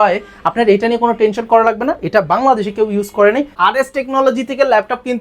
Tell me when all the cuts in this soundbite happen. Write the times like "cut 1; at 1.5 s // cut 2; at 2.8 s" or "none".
cut 1; at 3.5 s